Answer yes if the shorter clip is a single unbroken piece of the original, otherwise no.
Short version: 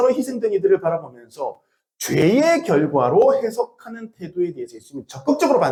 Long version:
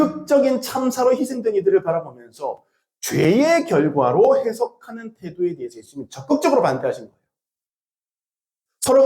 yes